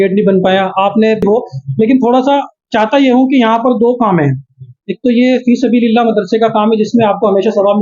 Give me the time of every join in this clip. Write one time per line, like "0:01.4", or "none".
0:01.2